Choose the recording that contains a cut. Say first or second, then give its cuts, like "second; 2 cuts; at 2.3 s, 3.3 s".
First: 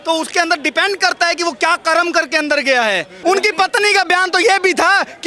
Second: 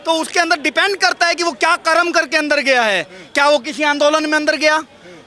first; 1 cut; at 3.1 s